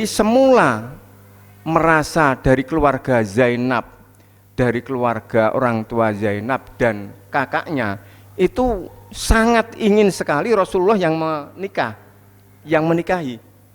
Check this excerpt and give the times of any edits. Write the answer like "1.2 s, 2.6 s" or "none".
none